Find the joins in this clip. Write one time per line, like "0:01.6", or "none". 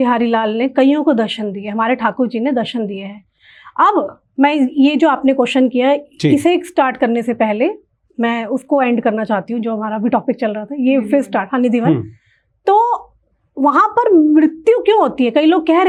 none